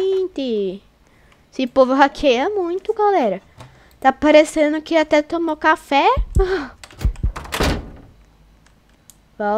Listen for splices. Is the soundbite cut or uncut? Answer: uncut